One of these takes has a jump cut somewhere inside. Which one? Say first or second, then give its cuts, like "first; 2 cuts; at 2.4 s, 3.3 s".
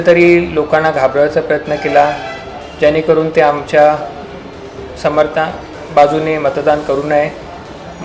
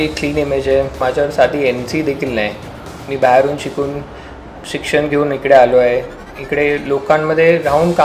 second; 1 cut; at 1.0 s